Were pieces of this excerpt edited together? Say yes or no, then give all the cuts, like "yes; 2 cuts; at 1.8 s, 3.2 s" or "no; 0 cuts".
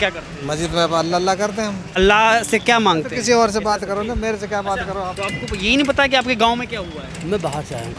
yes; 2 cuts; at 1.9 s, 5.1 s